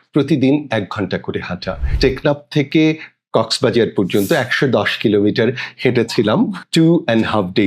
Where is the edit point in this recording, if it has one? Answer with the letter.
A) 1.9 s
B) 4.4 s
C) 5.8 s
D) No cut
A